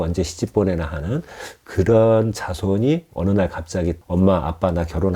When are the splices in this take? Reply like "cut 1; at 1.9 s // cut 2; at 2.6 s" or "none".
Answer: cut 1; at 3.1 s // cut 2; at 4.0 s